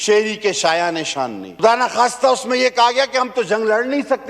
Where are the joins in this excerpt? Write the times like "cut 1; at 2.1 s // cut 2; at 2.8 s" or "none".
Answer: cut 1; at 1.5 s